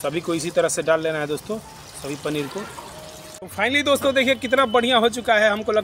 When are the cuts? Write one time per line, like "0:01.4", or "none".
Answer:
0:03.3